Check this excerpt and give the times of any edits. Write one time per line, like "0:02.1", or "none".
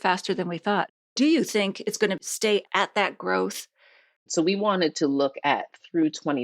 0:00.9
0:02.6
0:04.2